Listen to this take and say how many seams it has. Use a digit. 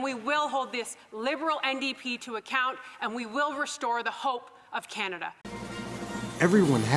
1